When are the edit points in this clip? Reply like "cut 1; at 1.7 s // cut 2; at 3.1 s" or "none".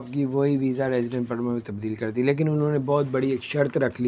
none